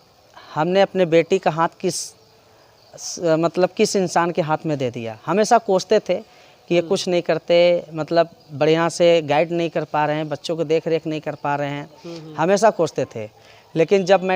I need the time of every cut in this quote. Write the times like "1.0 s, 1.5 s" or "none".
none

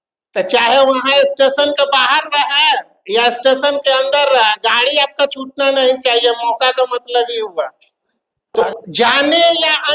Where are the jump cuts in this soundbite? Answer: 8.6 s

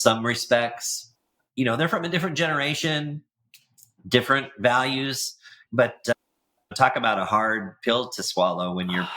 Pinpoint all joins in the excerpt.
5.6 s

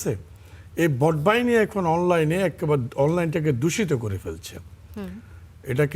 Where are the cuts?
none

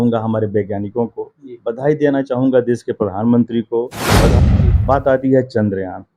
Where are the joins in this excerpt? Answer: 4.3 s

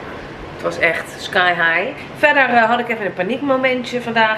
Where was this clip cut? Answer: 2.0 s

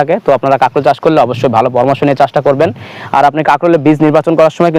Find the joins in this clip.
none

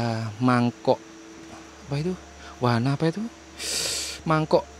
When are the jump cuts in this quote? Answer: none

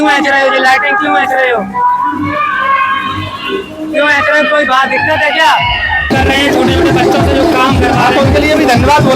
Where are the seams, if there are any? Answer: 6.1 s

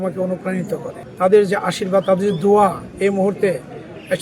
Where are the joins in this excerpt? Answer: 1.0 s

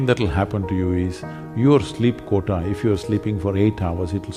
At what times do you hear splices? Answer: none

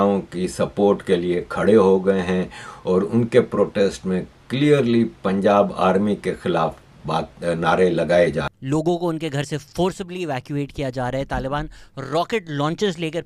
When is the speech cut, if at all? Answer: 8.6 s

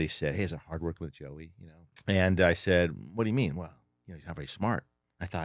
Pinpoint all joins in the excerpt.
1.9 s

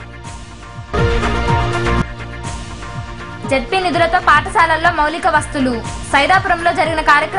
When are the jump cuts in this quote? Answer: none

